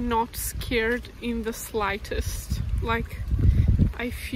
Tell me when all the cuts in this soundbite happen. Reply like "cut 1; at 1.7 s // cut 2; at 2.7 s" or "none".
none